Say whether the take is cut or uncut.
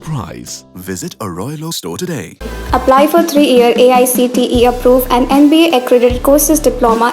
uncut